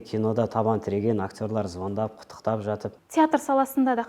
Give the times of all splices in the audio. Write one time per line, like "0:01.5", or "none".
0:02.9